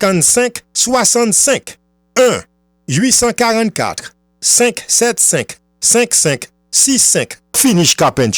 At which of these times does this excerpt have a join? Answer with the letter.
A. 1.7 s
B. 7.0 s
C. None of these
B